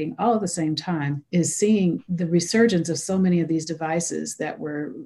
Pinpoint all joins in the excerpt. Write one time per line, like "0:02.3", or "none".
0:01.2
0:02.1